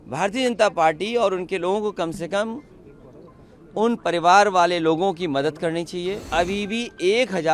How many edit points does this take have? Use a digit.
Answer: 1